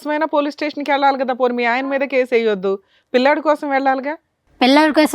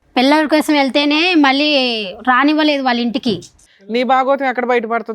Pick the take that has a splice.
second; 1 cut; at 3.6 s

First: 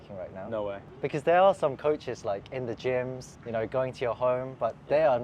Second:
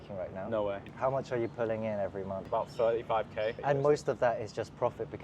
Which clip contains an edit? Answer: second; 3 cuts; at 0.9 s, 2.4 s, 3.6 s

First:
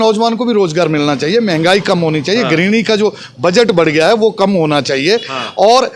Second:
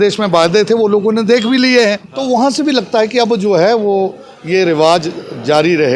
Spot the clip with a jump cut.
second; 1 cut; at 2.1 s

